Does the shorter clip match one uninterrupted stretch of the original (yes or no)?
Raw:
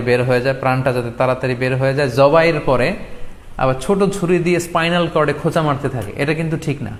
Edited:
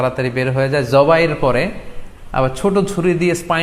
yes